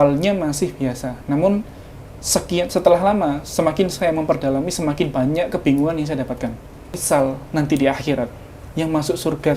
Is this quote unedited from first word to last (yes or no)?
no